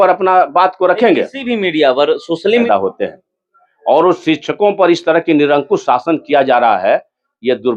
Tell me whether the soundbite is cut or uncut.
cut